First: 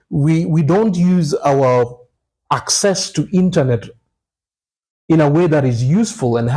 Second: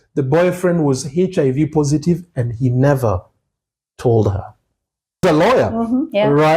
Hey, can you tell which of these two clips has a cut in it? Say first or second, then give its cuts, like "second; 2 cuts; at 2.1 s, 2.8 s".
second; 1 cut; at 5.2 s